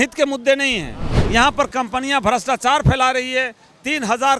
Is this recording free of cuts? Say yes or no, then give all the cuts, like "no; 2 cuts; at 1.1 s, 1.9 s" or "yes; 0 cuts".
no; 1 cut; at 1.1 s